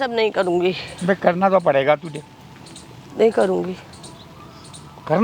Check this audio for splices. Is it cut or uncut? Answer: uncut